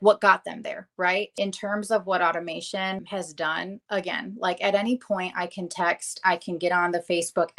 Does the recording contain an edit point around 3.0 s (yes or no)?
yes